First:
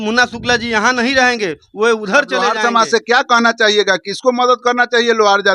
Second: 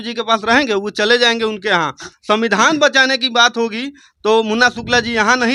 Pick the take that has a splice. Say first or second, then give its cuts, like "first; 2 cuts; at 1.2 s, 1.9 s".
first; 1 cut; at 2.5 s